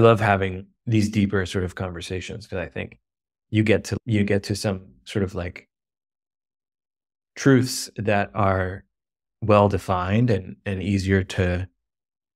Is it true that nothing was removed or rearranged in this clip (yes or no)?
yes